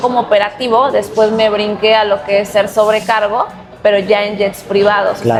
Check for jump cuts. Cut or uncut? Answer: uncut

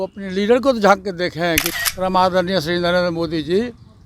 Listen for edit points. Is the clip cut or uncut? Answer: cut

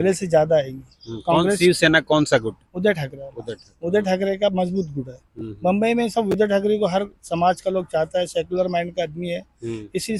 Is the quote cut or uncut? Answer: uncut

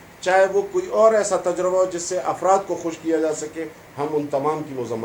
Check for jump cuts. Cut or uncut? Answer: uncut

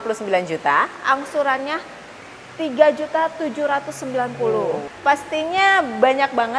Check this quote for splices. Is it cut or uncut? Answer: cut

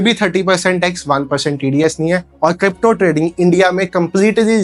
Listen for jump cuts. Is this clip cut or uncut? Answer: uncut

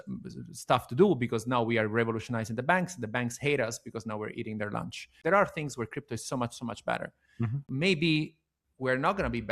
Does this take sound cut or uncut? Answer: cut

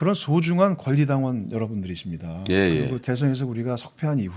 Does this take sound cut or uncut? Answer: cut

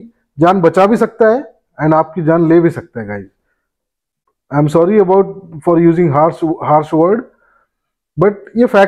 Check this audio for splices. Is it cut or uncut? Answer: uncut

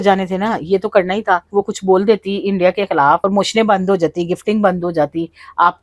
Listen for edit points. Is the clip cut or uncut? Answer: cut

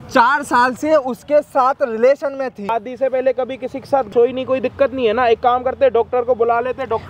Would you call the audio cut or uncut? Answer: cut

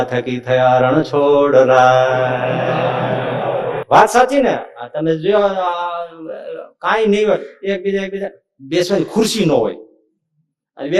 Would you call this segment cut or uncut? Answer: cut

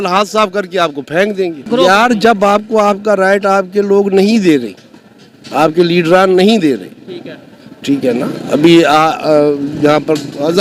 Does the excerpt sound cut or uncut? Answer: uncut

